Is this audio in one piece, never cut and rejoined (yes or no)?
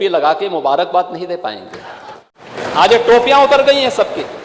no